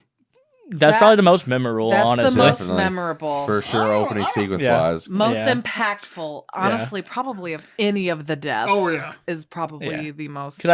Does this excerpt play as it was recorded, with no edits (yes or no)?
yes